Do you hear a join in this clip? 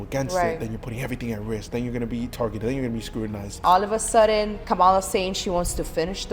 yes; 2 cuts; at 3.6 s, 4.6 s

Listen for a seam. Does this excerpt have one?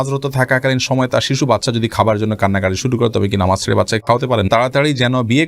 yes; 1 cut; at 4.5 s

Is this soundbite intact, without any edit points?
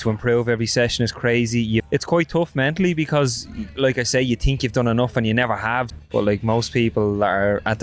no; 2 cuts; at 1.9 s, 5.9 s

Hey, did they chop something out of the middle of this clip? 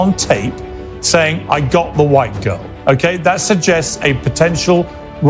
no; 0 cuts

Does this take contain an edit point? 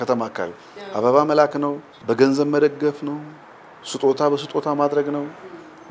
yes; 1 cut; at 1.9 s

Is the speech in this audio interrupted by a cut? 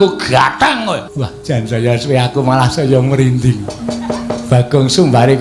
yes; 1 cut; at 1.1 s

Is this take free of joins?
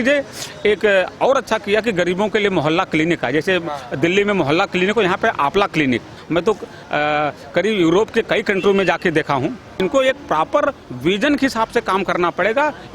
no; 2 cuts; at 6.2 s, 9.8 s

